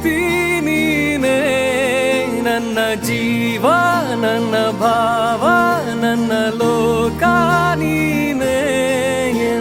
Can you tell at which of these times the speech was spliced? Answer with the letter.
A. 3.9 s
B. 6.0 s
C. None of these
C